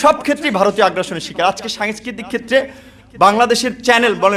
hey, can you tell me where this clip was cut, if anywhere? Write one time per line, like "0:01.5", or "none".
none